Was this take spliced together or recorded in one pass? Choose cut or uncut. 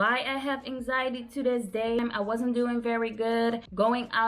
cut